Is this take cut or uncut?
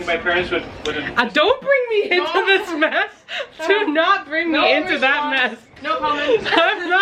uncut